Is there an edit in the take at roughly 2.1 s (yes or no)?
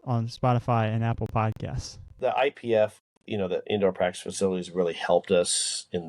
yes